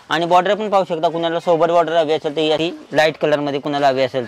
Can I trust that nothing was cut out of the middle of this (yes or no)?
no